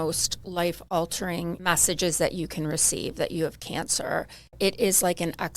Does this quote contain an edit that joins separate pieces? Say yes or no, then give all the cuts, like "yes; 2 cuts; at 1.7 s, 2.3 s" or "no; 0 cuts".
yes; 2 cuts; at 1.6 s, 4.6 s